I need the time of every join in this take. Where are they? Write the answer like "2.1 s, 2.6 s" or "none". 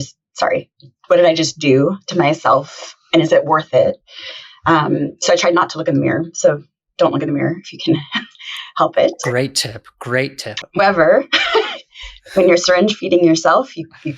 10.8 s